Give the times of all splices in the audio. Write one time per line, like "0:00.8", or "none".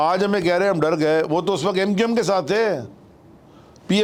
none